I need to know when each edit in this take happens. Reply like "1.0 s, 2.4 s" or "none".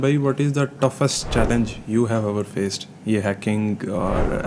none